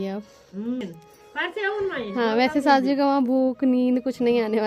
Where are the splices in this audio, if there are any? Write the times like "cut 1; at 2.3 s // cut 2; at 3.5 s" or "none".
none